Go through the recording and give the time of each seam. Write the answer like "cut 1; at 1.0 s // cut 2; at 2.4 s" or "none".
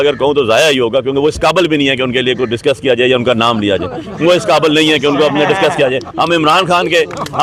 none